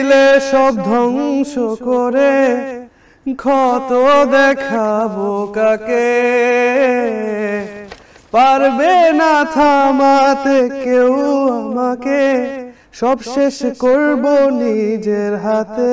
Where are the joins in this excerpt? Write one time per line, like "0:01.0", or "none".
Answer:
none

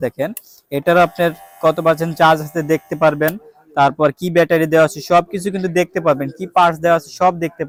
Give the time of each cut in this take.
none

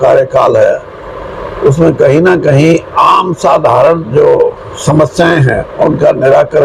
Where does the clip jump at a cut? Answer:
none

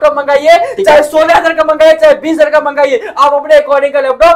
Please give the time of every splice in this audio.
none

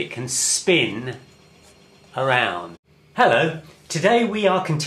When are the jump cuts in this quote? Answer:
none

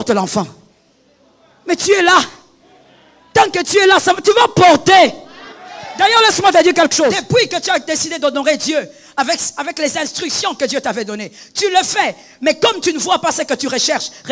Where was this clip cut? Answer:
0:07.2

